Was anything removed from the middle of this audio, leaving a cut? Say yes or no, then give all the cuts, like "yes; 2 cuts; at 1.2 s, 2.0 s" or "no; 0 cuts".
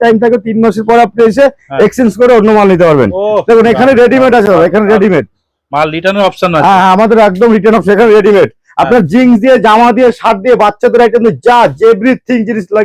no; 0 cuts